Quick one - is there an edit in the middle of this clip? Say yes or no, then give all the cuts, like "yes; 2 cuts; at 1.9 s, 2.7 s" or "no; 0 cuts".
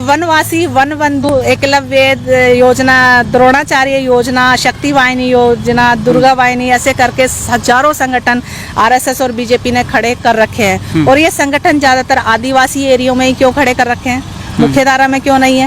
yes; 1 cut; at 1.3 s